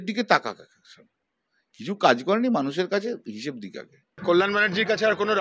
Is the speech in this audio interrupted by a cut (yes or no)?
yes